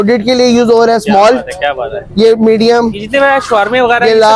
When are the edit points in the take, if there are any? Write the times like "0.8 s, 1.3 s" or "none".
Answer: none